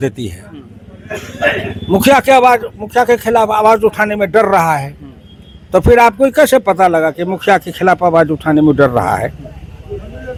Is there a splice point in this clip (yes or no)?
no